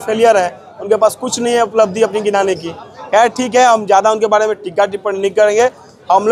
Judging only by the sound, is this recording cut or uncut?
uncut